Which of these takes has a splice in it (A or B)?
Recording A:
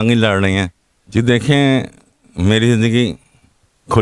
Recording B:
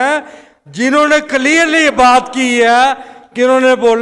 A